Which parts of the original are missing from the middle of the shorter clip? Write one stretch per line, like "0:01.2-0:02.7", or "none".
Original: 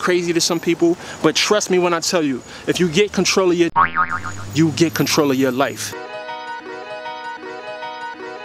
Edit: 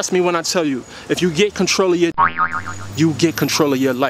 none